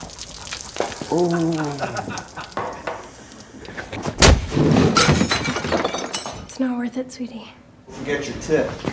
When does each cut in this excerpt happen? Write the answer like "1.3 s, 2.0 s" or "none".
7.9 s